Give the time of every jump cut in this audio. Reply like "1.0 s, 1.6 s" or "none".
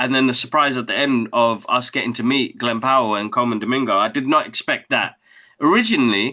none